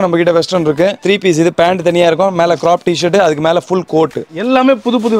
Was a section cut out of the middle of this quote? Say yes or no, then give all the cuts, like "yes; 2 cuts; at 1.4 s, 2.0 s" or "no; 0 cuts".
yes; 2 cuts; at 1.0 s, 4.3 s